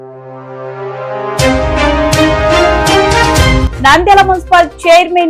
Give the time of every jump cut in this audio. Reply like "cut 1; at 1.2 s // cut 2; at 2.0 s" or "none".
cut 1; at 3.5 s